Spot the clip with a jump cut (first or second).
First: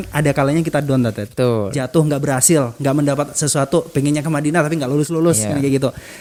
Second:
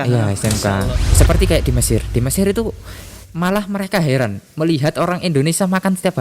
second